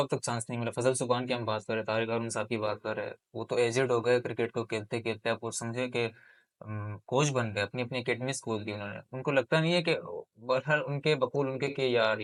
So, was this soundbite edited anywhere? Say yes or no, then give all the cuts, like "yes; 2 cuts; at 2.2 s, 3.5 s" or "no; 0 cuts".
no; 0 cuts